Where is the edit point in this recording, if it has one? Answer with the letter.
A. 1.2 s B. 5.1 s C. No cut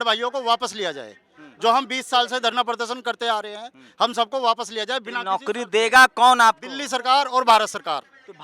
C